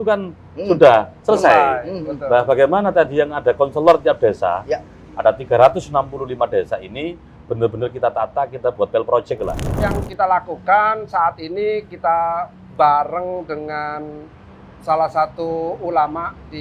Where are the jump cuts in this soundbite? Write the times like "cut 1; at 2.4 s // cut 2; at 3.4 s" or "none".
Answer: cut 1; at 9.8 s